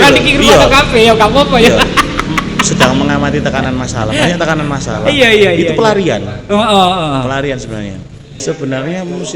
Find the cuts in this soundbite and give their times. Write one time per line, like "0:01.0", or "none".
0:08.4